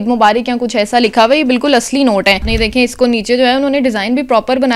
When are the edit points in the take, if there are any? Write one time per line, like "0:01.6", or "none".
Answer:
0:02.5

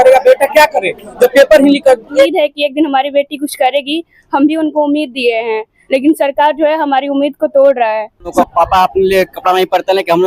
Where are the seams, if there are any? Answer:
0:02.3
0:08.3

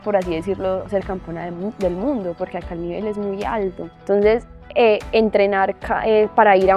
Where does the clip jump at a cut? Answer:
0:03.9

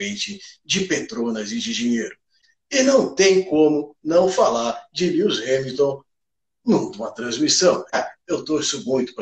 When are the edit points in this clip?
0:02.4
0:08.0

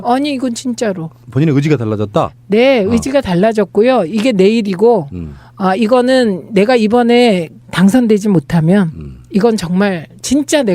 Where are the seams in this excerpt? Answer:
0:06.9

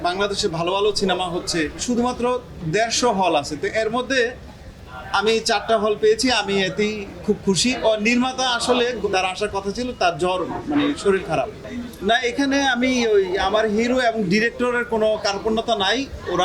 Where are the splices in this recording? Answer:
0:01.8
0:07.7
0:09.0
0:11.7

